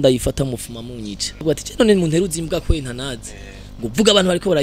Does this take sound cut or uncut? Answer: cut